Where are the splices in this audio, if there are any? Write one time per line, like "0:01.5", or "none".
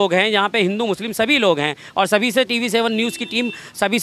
none